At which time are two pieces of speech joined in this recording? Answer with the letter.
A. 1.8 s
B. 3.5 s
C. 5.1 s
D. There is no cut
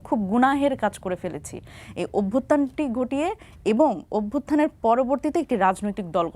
D